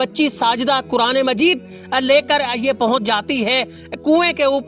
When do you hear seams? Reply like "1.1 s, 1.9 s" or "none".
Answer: none